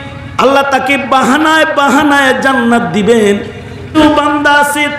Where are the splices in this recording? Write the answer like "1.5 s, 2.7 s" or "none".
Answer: 4.0 s